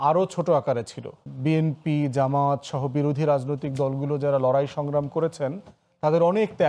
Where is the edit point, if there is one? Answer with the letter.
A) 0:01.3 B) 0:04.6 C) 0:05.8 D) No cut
A